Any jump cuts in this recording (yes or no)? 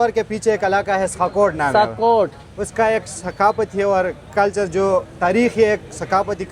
no